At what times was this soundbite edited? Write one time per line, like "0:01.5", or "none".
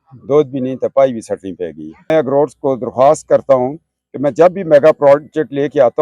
0:02.1